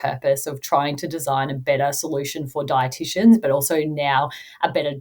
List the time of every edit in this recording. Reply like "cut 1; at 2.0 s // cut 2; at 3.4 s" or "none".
none